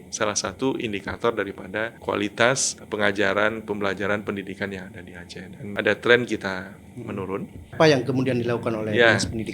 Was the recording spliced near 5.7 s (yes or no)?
yes